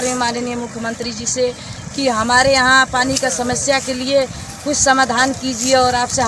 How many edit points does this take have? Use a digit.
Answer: 0